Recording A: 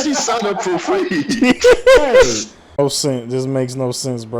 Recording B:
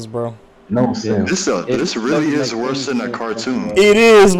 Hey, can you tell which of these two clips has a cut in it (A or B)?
A